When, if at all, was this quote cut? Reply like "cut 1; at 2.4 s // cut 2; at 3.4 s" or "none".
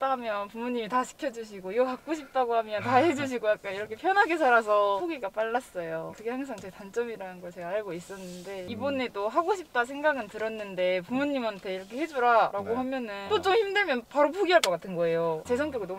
none